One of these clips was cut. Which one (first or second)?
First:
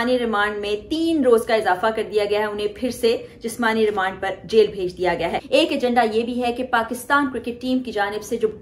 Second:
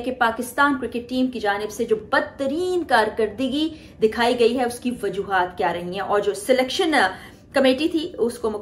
first